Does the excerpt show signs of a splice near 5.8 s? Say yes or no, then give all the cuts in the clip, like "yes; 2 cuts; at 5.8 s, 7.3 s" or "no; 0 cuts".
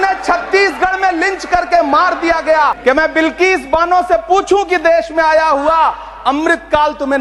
no; 1 cut; at 2.8 s